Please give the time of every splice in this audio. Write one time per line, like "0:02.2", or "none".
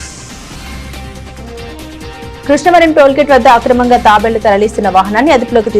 0:02.3